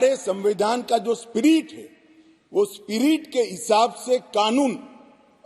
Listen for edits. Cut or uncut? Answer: uncut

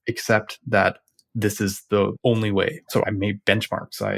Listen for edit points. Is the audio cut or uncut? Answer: cut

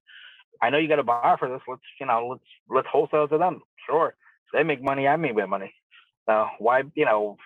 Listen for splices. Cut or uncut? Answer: cut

